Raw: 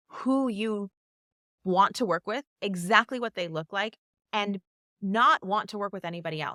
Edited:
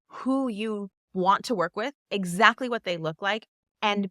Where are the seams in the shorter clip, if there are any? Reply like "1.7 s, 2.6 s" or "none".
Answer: 1.0 s

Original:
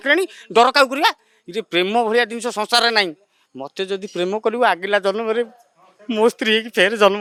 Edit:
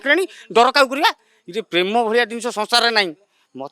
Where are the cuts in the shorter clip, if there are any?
none

